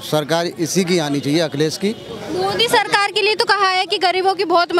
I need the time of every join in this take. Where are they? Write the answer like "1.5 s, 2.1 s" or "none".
none